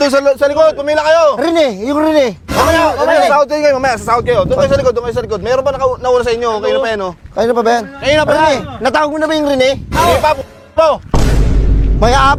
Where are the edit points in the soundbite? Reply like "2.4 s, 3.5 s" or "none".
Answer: none